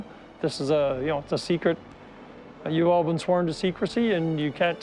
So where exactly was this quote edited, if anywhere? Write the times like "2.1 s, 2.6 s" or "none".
none